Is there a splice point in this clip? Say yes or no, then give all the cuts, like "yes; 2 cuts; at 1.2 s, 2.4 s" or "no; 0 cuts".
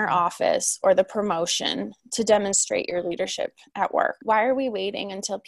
yes; 1 cut; at 4.2 s